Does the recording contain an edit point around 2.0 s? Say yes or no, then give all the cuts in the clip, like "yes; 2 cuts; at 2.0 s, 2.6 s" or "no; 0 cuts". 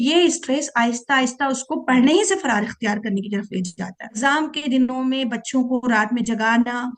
no; 1 cut; at 4.2 s